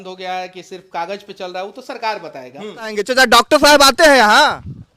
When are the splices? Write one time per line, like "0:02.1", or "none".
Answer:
0:02.9